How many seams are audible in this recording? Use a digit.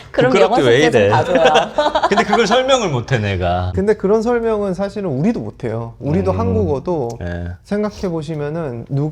1